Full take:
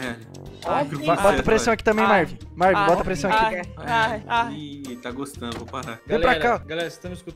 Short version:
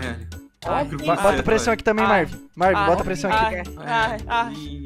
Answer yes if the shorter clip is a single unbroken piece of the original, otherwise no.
yes